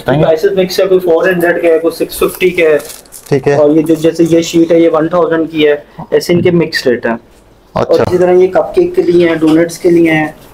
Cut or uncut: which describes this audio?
uncut